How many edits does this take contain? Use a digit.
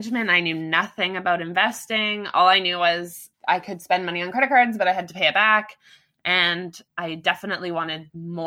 0